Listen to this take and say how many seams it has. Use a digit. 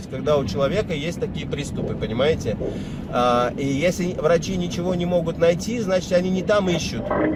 0